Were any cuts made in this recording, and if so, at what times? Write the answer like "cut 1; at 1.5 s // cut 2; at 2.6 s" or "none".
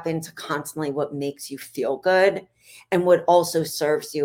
none